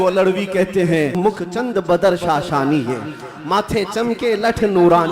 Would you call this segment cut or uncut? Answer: cut